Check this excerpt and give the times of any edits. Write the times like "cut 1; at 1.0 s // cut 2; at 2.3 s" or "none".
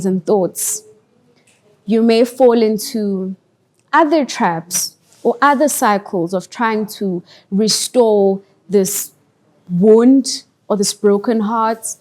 none